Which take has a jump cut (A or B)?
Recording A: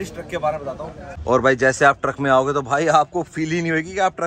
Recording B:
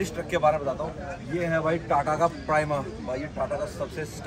A